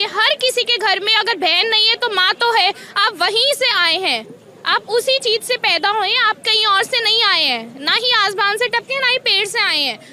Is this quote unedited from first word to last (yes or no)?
yes